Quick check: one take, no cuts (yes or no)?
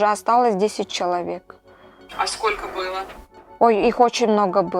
yes